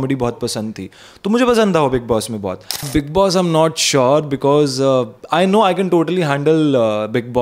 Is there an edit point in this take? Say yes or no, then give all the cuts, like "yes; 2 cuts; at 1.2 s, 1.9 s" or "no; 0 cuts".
yes; 1 cut; at 2.9 s